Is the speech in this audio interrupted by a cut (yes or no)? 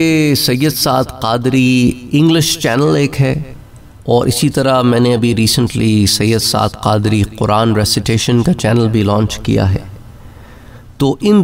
no